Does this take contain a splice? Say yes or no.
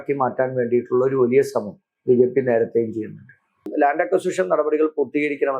yes